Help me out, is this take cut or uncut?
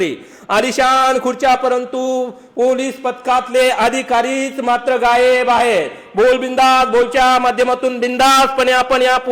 uncut